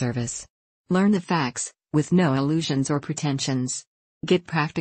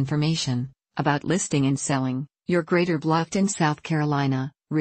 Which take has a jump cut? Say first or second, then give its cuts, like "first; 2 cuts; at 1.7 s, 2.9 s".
second; 2 cuts; at 1.8 s, 3.1 s